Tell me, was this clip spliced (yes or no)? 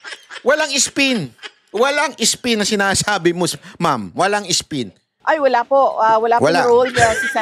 yes